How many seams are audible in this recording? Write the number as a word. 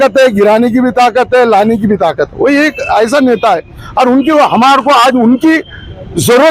zero